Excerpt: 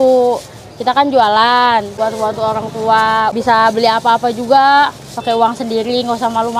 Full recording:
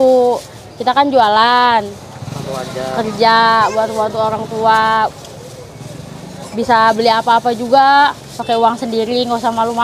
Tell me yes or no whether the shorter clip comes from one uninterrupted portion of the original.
no